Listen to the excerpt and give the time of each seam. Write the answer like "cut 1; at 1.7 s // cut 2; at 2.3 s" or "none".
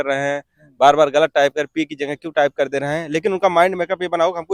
none